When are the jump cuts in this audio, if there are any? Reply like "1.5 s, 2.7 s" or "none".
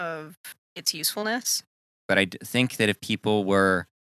2.0 s

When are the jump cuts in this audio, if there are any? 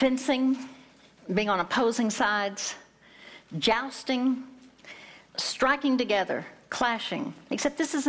none

